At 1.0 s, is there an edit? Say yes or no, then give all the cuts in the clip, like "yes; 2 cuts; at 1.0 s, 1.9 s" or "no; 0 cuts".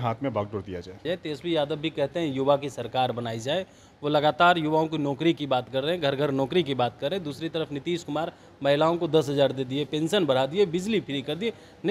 yes; 1 cut; at 1.0 s